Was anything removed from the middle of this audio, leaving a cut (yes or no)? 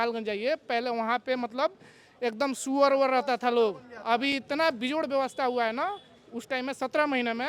no